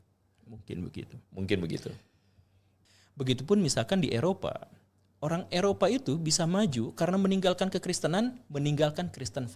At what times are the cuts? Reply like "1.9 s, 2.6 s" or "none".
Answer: 2.7 s